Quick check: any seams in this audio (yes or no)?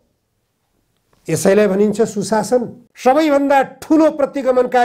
yes